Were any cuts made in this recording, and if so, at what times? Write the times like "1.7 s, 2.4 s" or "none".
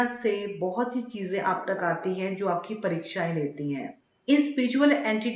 none

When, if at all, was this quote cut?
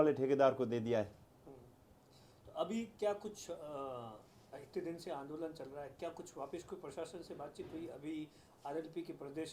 none

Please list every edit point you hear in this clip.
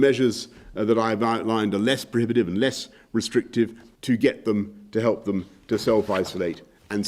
3.9 s

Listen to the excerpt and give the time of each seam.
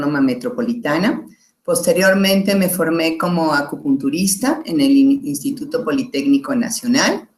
none

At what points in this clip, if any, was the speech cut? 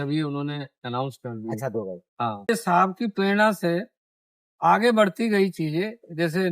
2.5 s

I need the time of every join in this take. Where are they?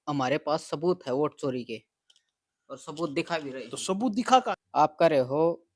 4.4 s

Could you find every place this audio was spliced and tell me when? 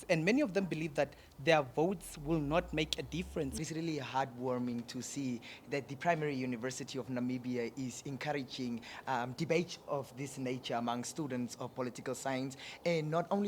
3.5 s

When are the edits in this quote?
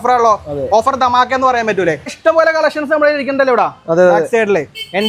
2.2 s

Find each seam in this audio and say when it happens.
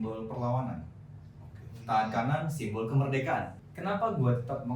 3.6 s

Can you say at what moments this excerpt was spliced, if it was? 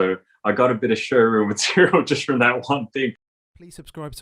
3.3 s

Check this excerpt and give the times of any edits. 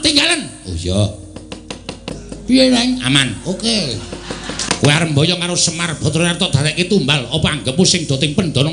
2.1 s, 4.6 s

